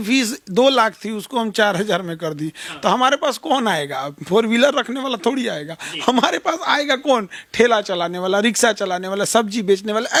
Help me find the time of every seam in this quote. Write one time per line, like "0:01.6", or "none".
none